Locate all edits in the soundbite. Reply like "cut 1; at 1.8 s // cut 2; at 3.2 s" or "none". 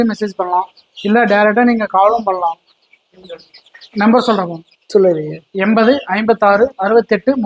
none